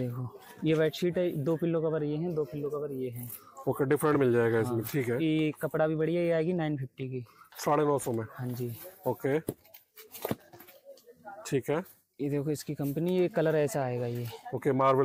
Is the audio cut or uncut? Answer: uncut